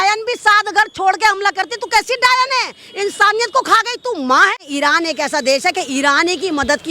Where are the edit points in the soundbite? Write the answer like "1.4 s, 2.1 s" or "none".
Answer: 4.6 s